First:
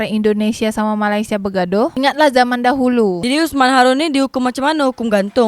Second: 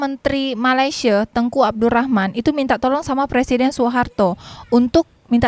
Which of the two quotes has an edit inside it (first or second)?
first